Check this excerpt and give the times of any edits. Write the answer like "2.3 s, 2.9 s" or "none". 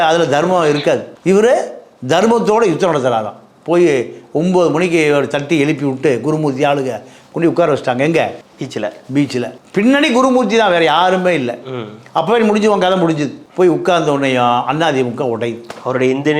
none